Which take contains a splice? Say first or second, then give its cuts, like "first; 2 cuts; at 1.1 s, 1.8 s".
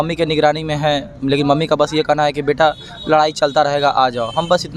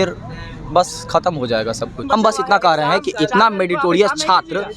second; 1 cut; at 2.0 s